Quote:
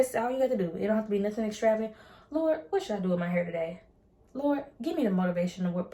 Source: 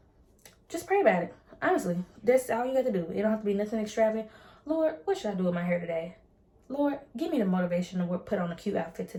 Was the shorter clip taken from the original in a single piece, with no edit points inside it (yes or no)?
yes